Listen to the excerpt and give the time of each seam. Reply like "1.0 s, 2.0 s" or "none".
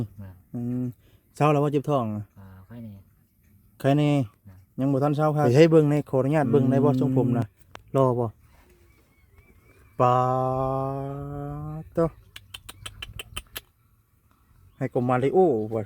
5.4 s

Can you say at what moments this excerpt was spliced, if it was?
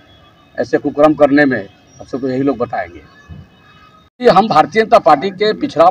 4.2 s

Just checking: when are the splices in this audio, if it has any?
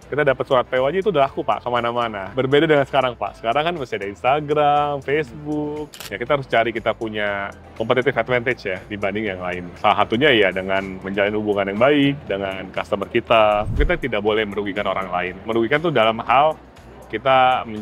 5.9 s, 13.8 s

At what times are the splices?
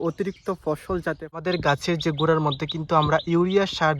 1.4 s

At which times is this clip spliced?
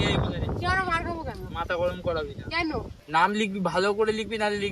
3.0 s

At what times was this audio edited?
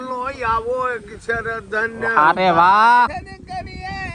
3.1 s

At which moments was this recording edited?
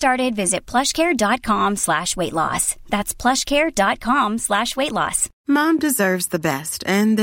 5.3 s

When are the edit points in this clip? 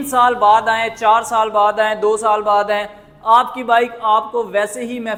none

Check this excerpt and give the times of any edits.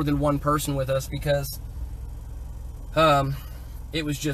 none

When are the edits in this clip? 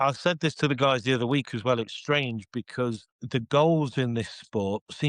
3.1 s

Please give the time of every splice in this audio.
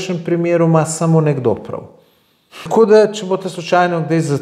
2.7 s

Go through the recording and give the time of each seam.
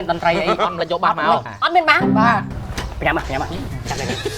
1.5 s, 2.5 s

